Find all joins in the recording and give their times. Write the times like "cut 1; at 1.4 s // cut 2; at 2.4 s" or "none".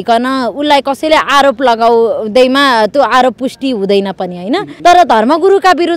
cut 1; at 4.7 s